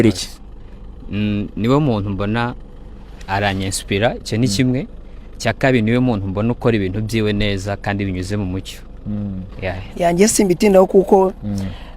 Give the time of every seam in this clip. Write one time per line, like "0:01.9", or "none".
0:09.8